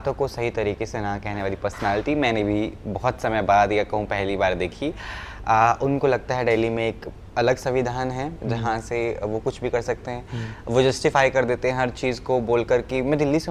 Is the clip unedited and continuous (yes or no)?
yes